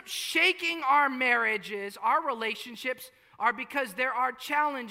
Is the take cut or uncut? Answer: uncut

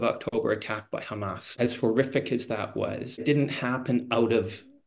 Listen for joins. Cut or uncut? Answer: cut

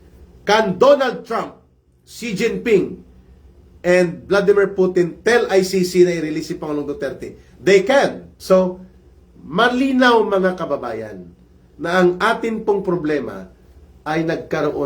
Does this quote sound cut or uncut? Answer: cut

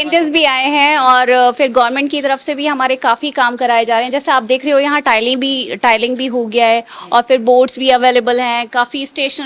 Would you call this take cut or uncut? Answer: uncut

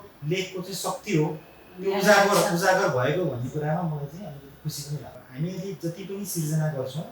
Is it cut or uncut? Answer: cut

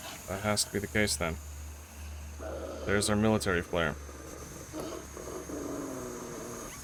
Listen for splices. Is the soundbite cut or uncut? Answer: uncut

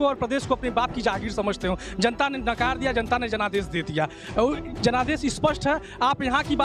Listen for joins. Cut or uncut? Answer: uncut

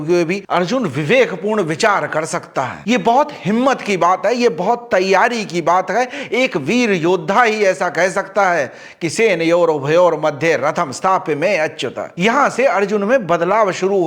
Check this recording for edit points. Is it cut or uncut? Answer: uncut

